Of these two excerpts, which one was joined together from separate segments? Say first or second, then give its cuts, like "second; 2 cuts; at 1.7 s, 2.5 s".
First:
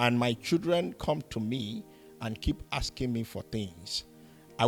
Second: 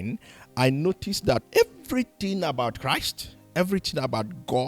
second; 1 cut; at 1.4 s